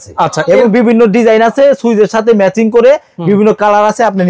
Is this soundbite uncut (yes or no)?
yes